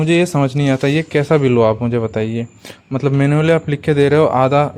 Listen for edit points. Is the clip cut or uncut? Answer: uncut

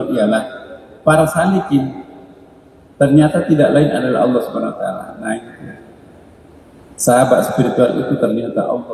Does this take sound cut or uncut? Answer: uncut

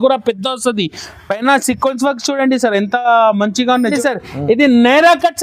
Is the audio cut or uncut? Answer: cut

